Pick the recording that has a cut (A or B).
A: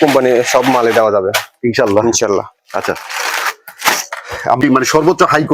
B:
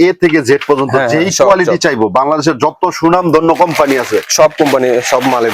A